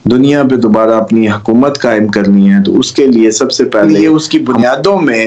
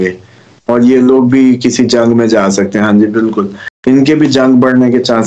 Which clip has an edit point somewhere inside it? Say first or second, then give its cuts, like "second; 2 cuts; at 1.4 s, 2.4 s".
first; 1 cut; at 3.9 s